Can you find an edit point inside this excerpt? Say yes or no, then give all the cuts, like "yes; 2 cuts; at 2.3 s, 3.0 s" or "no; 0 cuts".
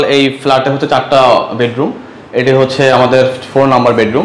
no; 0 cuts